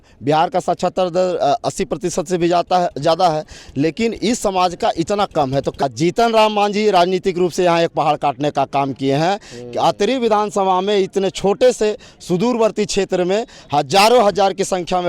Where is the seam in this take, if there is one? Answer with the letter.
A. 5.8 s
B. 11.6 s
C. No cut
A